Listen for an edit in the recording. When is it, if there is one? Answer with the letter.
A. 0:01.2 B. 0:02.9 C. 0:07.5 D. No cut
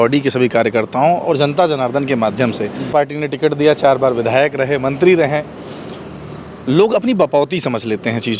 B